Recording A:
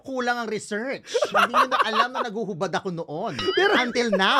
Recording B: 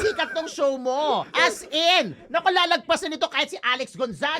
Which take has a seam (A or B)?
B